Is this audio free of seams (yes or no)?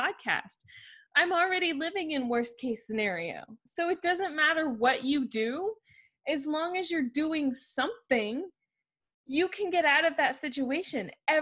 no